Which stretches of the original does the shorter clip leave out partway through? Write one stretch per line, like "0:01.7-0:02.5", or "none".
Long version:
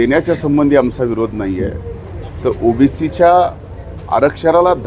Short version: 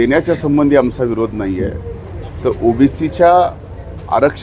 none